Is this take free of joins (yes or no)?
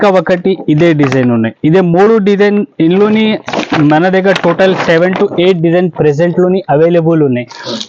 yes